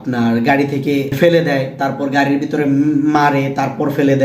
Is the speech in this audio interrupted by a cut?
yes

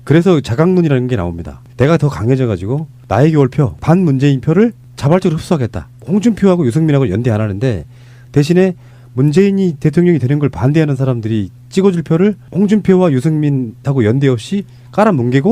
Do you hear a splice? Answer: yes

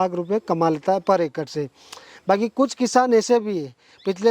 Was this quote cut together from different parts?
no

